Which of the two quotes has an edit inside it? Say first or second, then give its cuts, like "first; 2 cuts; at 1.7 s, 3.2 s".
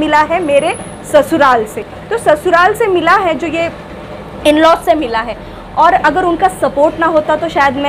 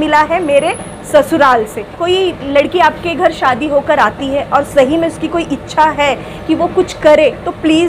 second; 1 cut; at 2.0 s